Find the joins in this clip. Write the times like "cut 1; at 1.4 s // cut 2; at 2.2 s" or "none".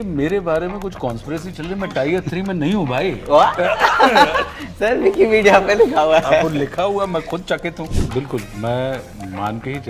cut 1; at 7.9 s